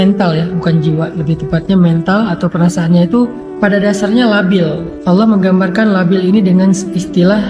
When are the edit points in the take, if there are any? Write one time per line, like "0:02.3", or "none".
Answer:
0:03.4
0:04.9